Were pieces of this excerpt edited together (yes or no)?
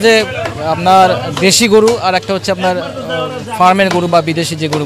no